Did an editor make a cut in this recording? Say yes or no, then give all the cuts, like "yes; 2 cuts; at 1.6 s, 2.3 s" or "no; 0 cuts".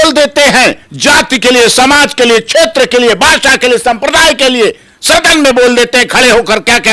no; 0 cuts